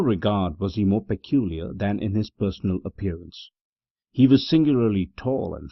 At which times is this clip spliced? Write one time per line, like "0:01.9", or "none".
none

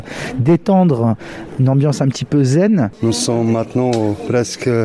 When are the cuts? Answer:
0:02.9

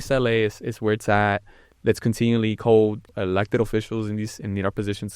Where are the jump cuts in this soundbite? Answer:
0:03.1

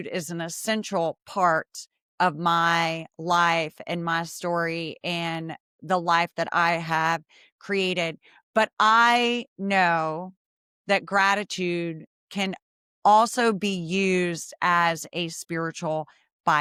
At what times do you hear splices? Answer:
none

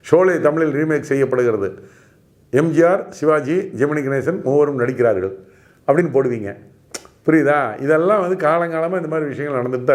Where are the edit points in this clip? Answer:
none

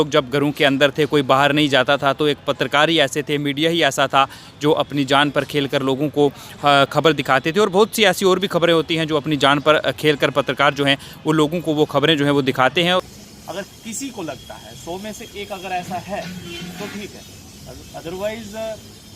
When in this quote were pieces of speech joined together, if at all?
0:13.0

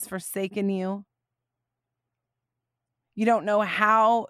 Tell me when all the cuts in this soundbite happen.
none

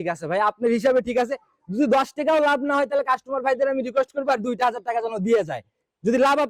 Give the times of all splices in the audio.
none

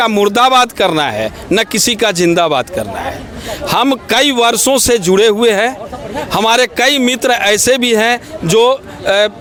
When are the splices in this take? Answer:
none

